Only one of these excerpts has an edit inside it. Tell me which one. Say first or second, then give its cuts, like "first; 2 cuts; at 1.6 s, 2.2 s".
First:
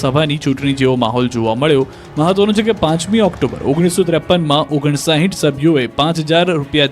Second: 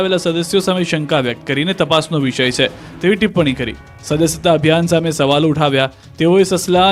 first; 1 cut; at 5.7 s